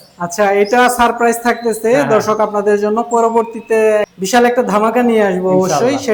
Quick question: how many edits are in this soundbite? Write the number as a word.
zero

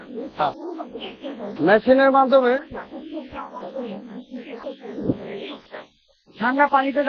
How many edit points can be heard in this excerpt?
zero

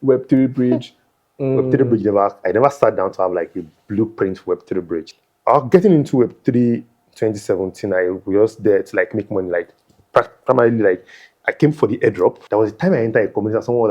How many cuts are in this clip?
three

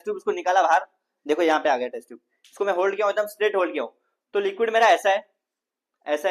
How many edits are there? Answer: zero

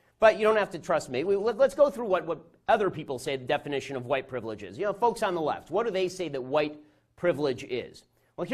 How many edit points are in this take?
one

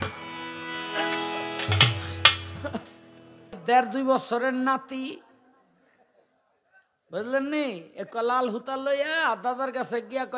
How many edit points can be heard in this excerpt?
one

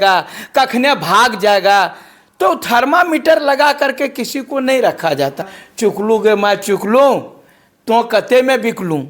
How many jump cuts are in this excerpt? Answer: one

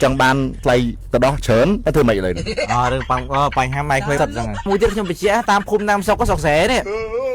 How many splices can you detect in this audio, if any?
one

